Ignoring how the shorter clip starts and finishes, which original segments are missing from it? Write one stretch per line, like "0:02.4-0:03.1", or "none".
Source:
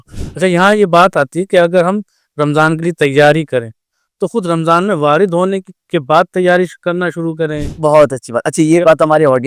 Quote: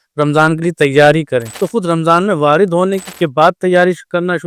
0:03.8-0:04.2
0:05.7-0:05.8